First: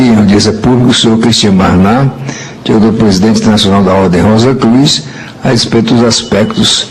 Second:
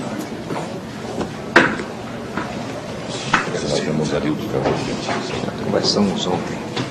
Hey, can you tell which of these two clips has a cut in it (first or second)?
second